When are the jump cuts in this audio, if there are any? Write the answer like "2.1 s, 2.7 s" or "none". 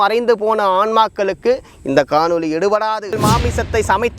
3.2 s